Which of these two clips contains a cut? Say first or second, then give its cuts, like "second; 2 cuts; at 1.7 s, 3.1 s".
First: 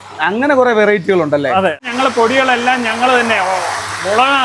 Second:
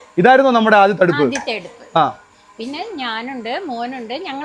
first; 1 cut; at 1.9 s